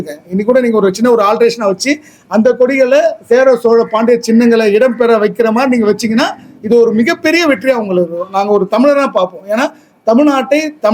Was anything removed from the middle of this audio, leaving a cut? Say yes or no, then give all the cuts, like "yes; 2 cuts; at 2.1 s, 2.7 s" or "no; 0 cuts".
no; 0 cuts